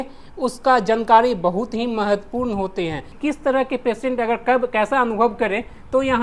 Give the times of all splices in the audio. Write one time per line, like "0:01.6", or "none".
0:03.1